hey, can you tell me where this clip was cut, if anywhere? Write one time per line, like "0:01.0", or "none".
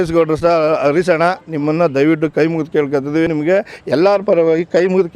0:03.3